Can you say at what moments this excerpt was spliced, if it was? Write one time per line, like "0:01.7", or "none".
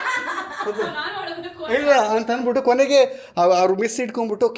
none